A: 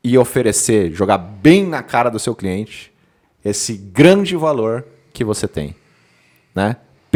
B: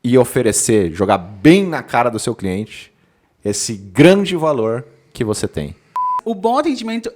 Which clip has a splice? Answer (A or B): B